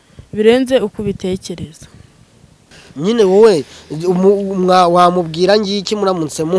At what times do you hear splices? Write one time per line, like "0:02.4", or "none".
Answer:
0:02.8